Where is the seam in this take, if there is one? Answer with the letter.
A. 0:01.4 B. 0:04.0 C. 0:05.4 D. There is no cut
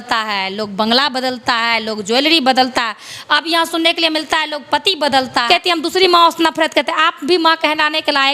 C